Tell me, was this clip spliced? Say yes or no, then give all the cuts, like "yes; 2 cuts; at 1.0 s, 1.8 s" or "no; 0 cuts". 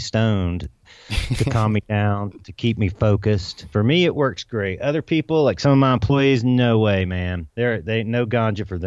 yes; 2 cuts; at 3.6 s, 7.4 s